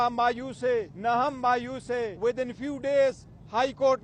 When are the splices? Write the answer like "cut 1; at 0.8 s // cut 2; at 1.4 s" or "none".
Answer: cut 1; at 0.9 s // cut 2; at 2.1 s